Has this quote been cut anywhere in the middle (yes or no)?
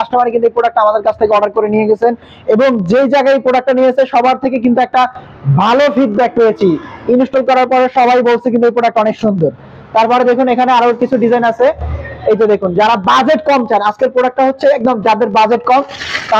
no